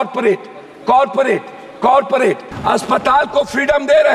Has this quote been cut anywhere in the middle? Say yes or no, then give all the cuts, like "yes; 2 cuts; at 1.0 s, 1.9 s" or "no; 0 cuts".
yes; 1 cut; at 2.5 s